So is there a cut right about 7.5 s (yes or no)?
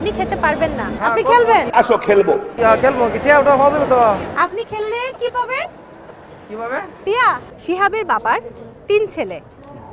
yes